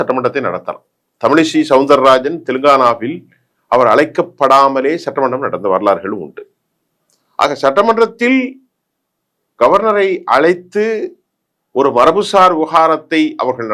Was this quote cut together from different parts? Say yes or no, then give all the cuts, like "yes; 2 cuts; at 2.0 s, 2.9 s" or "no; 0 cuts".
no; 0 cuts